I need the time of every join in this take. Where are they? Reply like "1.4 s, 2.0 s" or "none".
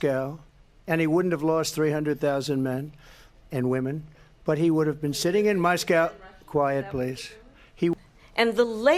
7.9 s